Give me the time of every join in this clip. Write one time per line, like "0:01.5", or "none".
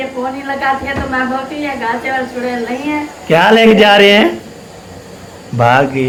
none